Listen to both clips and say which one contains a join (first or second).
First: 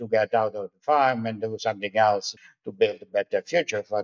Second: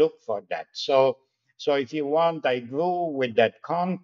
first